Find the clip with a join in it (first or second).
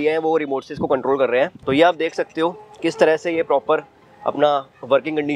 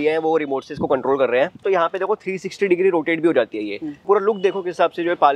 second